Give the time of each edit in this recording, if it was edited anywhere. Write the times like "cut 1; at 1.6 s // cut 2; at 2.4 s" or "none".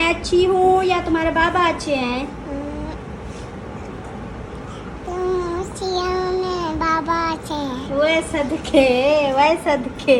none